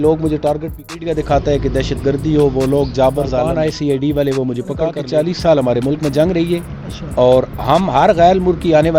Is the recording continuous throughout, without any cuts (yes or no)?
no